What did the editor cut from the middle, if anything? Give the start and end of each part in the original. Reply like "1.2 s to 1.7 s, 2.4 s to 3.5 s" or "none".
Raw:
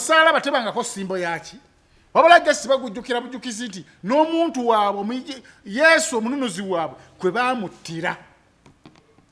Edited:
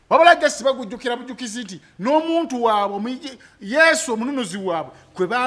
none